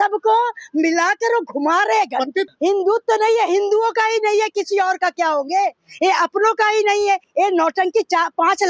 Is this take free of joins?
no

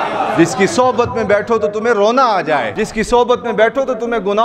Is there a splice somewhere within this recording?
yes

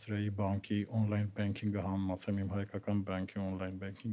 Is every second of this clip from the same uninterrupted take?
yes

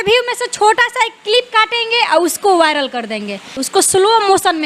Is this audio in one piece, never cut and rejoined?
no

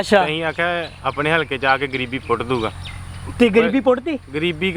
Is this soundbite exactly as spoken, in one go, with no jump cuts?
yes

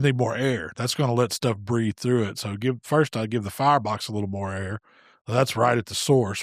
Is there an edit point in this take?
no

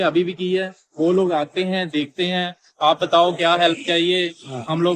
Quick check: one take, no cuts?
yes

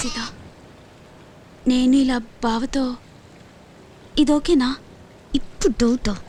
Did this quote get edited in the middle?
no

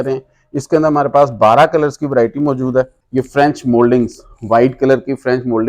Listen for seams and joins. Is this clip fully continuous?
no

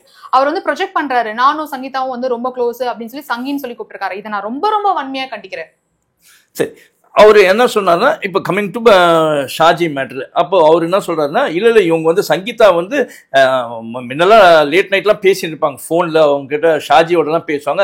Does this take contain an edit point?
no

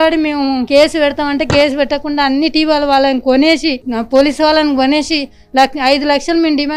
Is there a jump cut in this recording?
no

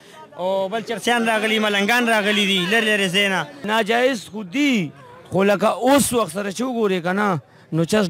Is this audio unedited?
no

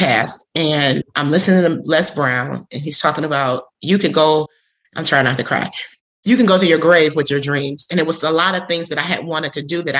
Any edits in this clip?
yes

